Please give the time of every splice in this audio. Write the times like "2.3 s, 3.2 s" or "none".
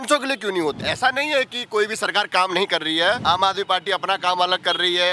0.8 s, 3.2 s